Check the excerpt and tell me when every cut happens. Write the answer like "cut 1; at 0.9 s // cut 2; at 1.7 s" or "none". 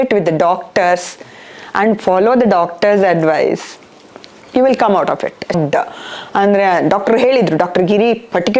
cut 1; at 5.5 s